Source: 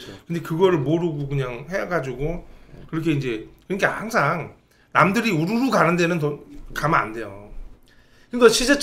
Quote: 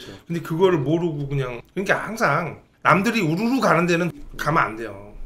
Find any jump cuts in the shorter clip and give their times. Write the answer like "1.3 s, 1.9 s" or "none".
1.6 s, 2.6 s, 4.1 s